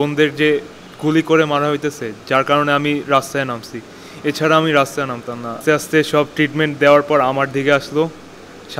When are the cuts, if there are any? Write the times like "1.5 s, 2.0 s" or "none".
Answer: 5.6 s